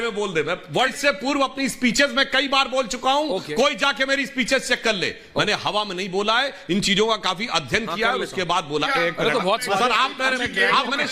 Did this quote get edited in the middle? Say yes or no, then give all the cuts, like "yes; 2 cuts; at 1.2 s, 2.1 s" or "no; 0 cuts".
yes; 2 cuts; at 0.9 s, 8.9 s